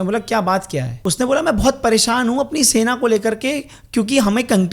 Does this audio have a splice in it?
yes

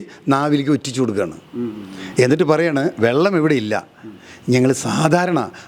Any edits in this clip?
no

